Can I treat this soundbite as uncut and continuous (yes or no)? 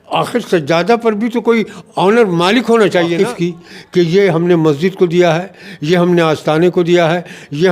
no